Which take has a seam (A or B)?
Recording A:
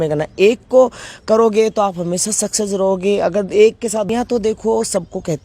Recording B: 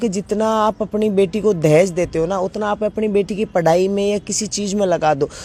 A